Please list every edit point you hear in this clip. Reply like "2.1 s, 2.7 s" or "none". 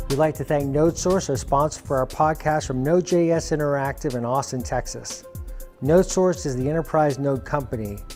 none